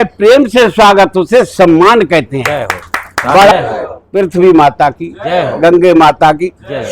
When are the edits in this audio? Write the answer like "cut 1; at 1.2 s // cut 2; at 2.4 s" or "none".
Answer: cut 1; at 3.5 s